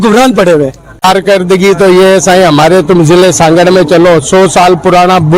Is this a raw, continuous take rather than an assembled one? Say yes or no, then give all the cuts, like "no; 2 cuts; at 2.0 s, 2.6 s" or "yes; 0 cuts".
no; 1 cut; at 1.0 s